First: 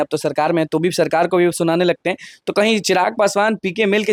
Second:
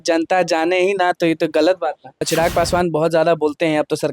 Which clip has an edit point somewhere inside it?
second; 1 cut; at 2.3 s

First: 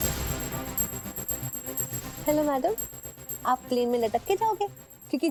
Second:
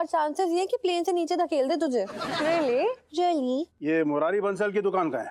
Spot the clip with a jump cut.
second; 1 cut; at 3.7 s

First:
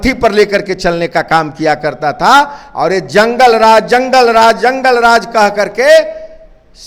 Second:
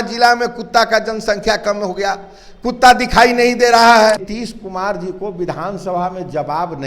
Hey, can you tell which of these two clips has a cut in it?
second; 1 cut; at 4.2 s

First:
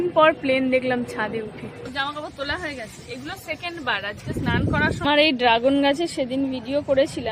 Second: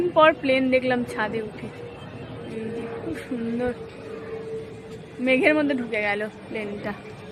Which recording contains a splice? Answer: first; 2 cuts; at 1.9 s, 5.0 s

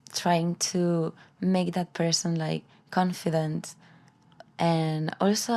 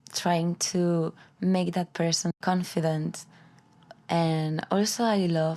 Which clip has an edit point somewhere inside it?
second; 1 cut; at 2.3 s

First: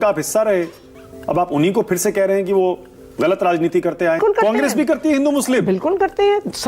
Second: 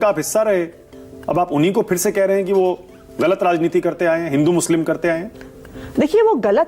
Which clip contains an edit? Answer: first; 1 cut; at 4.2 s

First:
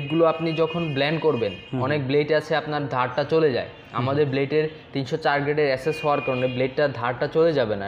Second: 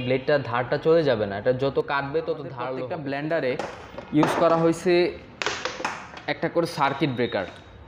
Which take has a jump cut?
second; 1 cut; at 2.6 s

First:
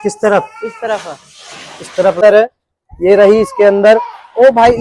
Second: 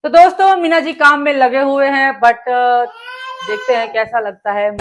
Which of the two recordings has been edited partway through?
first; 1 cut; at 2.2 s

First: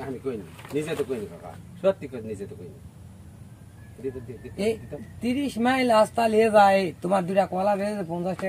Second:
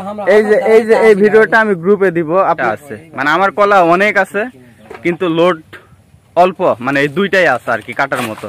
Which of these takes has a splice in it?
second; 1 cut; at 2.6 s

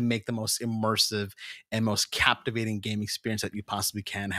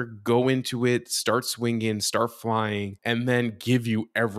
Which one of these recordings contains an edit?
second; 1 cut; at 2.9 s

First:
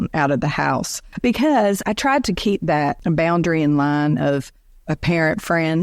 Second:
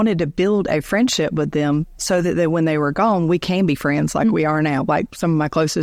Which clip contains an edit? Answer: first; 3 cuts; at 1.0 s, 1.8 s, 3.0 s

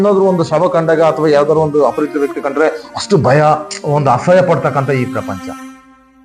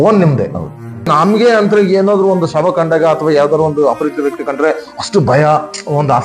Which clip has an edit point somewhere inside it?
second; 1 cut; at 1.1 s

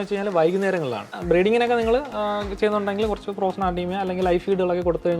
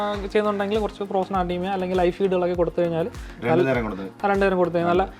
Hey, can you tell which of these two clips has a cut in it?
first; 1 cut; at 1.2 s

